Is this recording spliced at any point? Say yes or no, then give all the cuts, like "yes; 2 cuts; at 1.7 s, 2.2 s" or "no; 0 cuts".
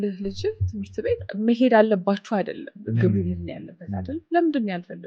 yes; 2 cuts; at 1.3 s, 2.7 s